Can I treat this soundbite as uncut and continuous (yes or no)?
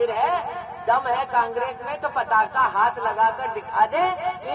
yes